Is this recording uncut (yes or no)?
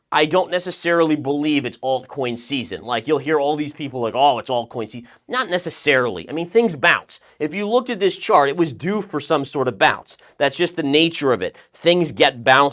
yes